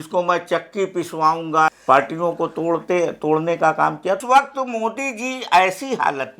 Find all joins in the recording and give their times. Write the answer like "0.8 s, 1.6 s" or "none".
1.8 s, 4.2 s